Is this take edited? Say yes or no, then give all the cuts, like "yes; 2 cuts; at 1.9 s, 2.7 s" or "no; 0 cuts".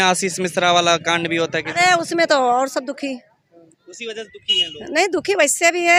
no; 0 cuts